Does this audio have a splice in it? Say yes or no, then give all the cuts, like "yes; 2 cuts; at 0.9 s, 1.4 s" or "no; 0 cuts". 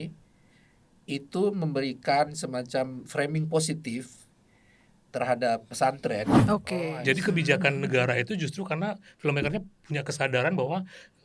yes; 1 cut; at 6.4 s